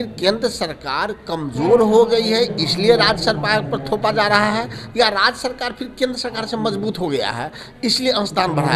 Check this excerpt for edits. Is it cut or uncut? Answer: uncut